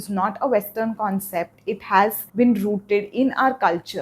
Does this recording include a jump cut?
yes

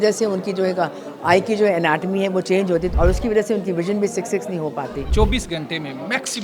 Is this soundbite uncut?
no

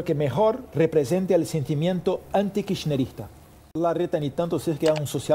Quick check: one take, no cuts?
no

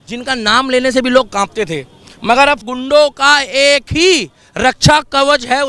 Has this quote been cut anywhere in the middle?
yes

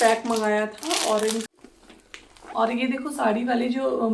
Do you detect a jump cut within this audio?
yes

